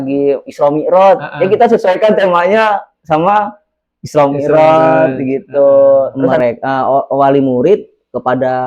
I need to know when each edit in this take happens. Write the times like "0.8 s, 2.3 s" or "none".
6.2 s